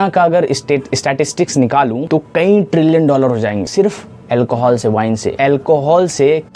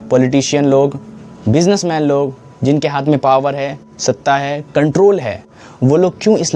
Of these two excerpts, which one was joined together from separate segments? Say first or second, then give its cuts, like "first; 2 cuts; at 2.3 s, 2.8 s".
first; 3 cuts; at 2.0 s, 3.7 s, 5.3 s